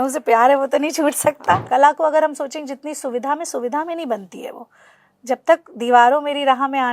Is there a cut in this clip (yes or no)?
yes